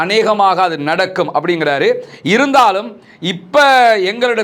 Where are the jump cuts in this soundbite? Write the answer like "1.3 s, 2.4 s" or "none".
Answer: none